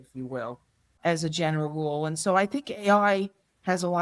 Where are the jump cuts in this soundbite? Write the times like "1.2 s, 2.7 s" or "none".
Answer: 1.0 s